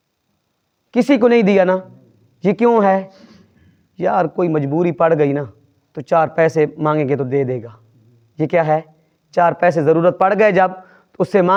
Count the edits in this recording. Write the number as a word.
zero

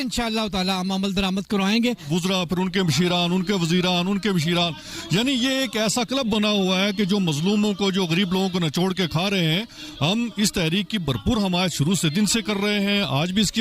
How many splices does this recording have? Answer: one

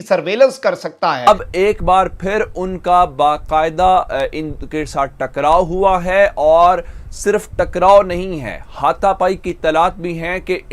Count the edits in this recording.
one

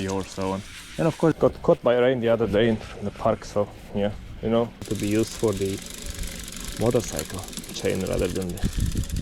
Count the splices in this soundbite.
two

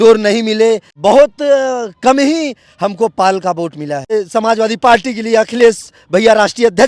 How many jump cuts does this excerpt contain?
two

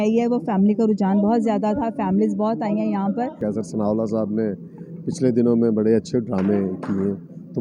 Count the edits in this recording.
one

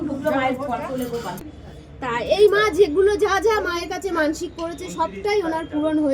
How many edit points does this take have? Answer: one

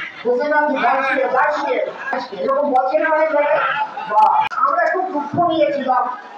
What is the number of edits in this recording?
one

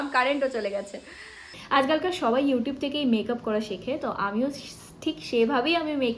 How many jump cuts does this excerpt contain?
one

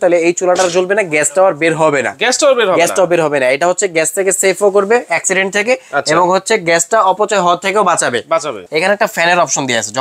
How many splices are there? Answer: one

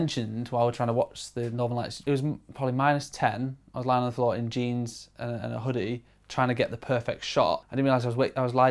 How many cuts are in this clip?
two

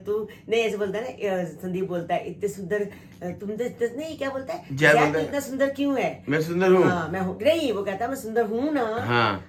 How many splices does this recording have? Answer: zero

